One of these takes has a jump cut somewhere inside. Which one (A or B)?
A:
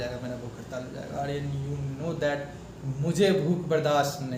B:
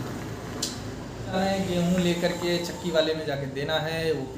B